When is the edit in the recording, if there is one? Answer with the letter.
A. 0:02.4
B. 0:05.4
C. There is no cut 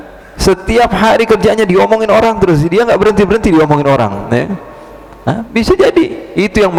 C